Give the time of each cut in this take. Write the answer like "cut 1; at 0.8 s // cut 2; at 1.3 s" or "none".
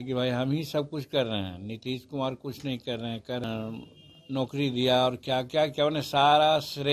cut 1; at 3.4 s